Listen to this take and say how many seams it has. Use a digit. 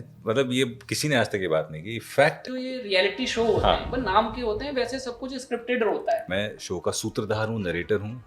2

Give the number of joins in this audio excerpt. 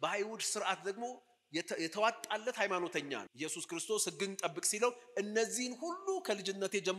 1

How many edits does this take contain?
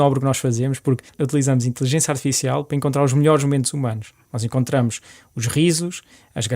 1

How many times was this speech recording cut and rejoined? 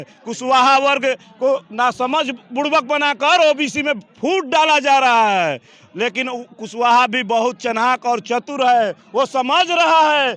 0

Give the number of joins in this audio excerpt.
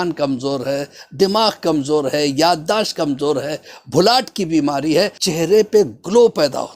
1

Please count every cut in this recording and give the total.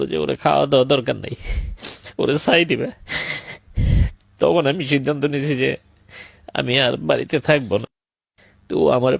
1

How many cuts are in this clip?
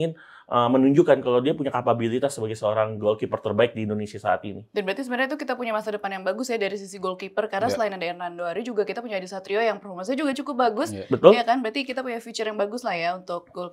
0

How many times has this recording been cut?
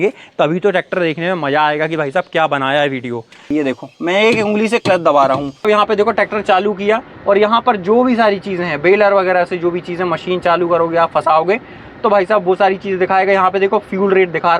2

